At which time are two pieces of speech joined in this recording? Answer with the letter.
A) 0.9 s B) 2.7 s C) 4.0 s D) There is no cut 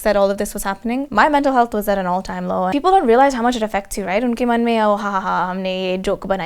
B